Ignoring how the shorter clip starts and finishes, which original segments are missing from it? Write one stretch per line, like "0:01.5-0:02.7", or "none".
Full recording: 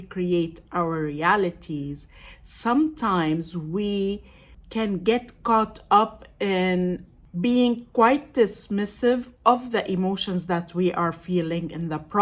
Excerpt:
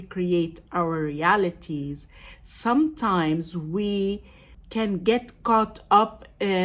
none